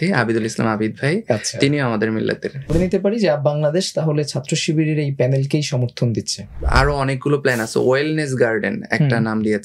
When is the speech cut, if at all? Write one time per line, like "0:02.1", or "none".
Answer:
0:02.7
0:06.6

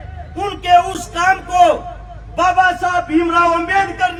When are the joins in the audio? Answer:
none

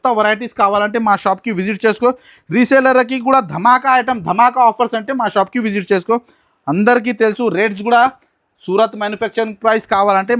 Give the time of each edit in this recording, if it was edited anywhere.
none

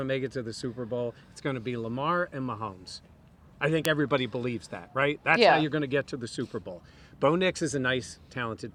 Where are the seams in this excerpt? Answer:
none

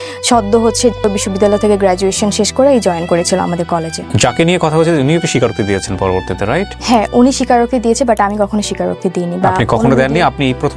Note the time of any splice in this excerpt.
0:01.0
0:04.0
0:06.7

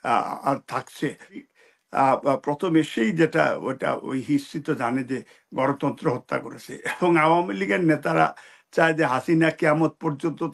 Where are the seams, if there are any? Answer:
0:01.4

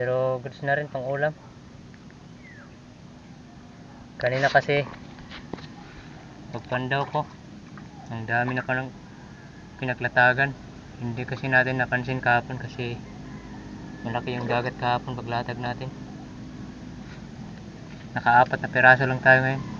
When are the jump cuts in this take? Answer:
none

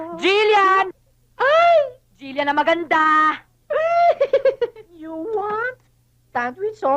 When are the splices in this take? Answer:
0:05.0

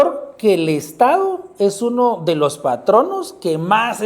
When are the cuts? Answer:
none

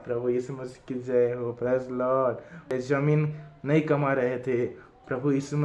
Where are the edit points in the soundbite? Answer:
0:02.7

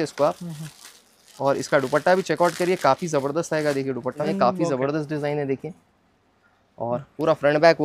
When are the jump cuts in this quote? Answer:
0:04.2

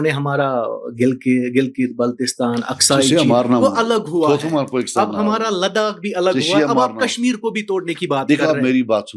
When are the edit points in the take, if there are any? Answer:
none

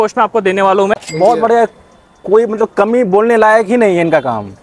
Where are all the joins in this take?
0:01.1

